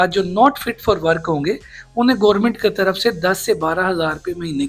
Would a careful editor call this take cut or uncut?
uncut